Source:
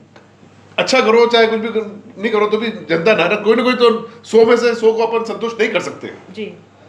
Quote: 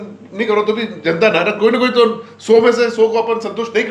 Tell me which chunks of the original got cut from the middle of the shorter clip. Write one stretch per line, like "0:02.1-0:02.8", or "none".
none